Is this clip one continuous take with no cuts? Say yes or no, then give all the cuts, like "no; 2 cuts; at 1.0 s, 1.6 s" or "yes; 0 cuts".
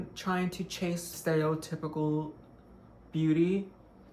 no; 1 cut; at 1.1 s